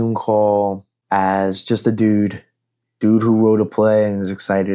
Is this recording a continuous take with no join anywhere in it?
no; 1 cut; at 0.9 s

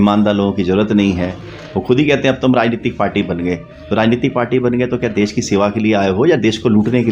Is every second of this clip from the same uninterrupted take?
yes; 0 cuts

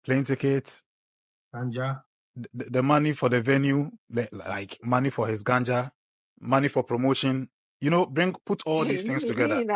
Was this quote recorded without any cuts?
yes; 0 cuts

